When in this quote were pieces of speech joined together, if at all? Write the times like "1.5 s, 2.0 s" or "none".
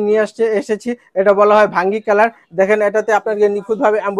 none